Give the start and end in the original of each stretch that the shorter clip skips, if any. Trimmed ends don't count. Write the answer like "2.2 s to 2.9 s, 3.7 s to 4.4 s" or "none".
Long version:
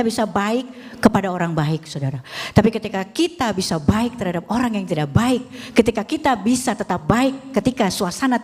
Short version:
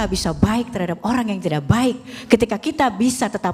none